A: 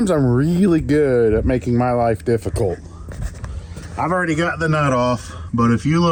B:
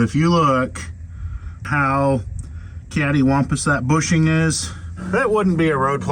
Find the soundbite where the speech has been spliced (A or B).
B